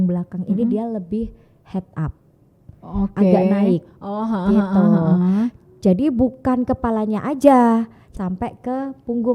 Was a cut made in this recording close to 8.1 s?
yes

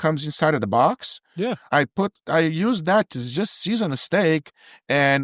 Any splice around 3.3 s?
no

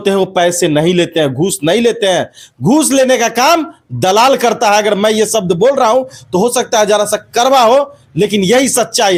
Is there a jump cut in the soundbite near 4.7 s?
no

